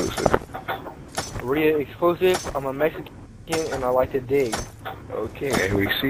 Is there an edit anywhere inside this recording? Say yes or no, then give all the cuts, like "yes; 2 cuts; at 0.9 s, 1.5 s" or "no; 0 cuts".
no; 0 cuts